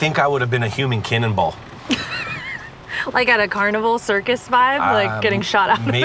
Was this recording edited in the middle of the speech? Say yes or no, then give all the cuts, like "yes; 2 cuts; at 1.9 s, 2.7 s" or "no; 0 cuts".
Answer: no; 0 cuts